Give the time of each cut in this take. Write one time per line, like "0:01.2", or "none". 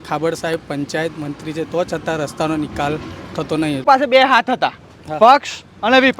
0:03.9